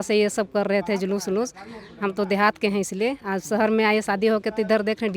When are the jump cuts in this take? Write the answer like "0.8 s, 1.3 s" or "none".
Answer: none